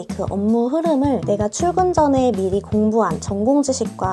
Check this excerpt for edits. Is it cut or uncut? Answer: uncut